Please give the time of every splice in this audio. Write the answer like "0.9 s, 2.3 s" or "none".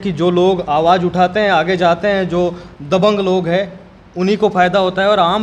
none